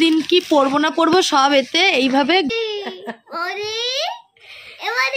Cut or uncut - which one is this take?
cut